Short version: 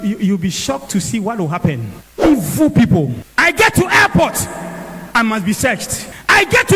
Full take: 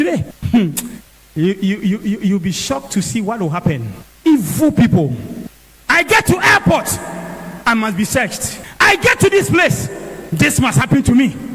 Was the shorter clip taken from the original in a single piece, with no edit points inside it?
no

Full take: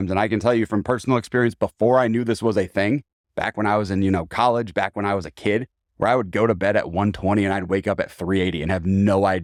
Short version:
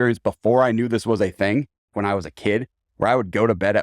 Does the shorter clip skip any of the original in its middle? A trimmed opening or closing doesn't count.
yes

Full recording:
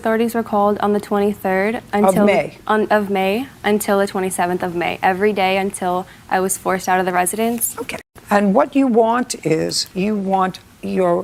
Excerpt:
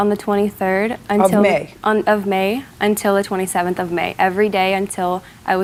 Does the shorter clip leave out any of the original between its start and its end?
no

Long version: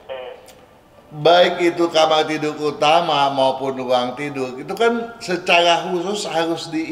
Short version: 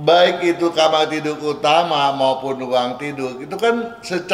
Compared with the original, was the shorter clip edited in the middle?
no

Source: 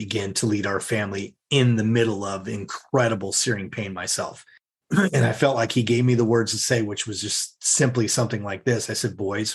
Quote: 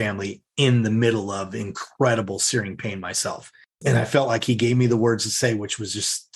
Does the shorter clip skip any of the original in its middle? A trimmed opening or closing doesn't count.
yes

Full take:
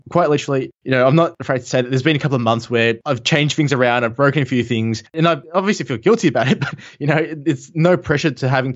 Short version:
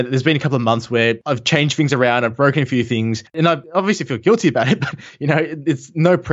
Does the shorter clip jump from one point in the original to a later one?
no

